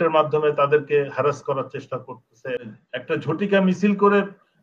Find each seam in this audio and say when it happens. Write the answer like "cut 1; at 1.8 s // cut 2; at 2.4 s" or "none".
cut 1; at 2.6 s